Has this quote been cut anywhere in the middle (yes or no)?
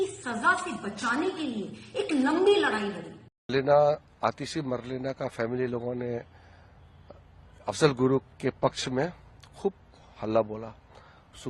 yes